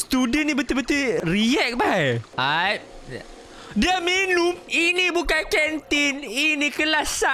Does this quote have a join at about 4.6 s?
yes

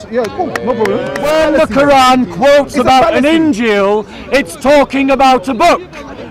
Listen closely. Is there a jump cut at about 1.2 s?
yes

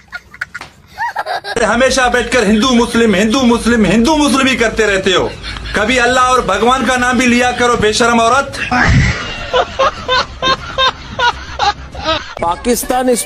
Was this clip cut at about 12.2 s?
yes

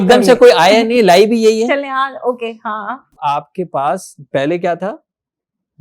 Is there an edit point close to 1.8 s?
no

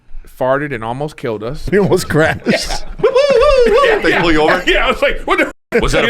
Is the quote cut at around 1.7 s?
yes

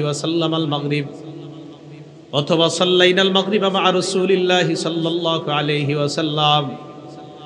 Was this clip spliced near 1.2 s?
no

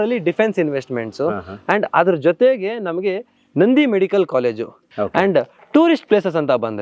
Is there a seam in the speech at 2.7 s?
no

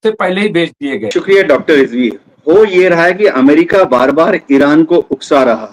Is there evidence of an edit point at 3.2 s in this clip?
no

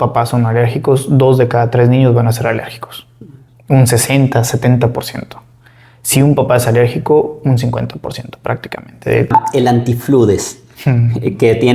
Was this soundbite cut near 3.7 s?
no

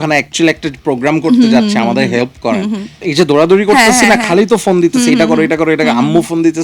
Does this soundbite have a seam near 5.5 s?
no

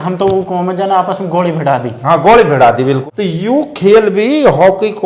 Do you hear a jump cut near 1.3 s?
no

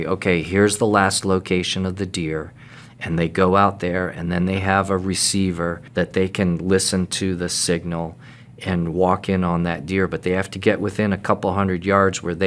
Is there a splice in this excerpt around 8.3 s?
no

